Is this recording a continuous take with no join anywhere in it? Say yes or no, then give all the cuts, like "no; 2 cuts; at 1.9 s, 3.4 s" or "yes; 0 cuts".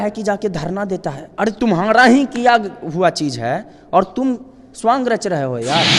yes; 0 cuts